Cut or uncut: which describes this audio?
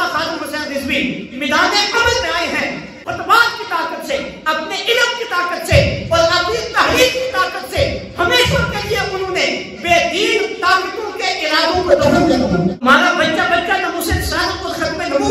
cut